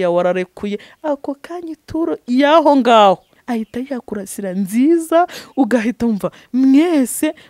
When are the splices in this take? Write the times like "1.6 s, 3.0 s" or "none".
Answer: 3.4 s